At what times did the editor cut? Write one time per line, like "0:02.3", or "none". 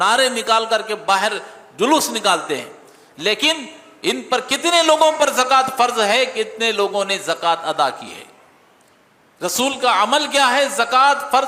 none